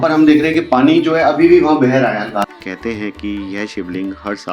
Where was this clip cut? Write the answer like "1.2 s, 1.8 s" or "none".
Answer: 2.6 s

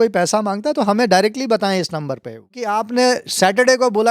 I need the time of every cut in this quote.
2.7 s

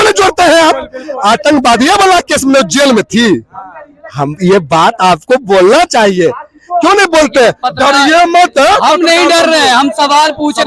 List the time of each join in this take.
none

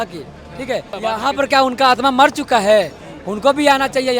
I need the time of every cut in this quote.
0.9 s

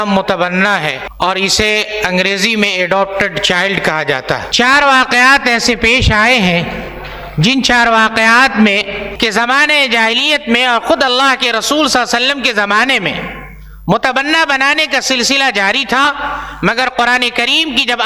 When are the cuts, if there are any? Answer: 1.0 s, 4.5 s, 9.0 s

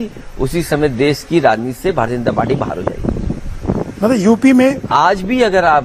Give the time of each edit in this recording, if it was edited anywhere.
none

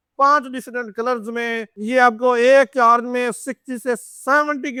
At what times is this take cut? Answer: none

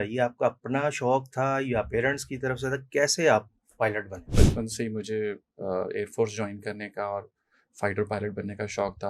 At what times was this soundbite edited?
4.3 s

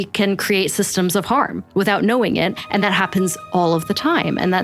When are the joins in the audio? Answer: none

